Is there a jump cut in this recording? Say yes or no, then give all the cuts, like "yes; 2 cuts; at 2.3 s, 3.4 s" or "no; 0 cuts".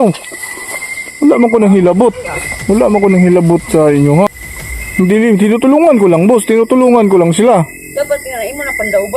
yes; 1 cut; at 4.3 s